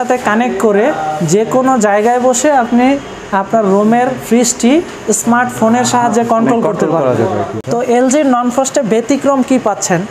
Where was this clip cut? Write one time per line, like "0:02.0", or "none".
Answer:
0:07.5